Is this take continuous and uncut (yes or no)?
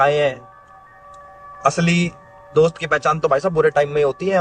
yes